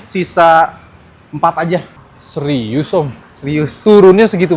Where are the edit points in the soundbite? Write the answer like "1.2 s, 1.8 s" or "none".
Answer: 1.9 s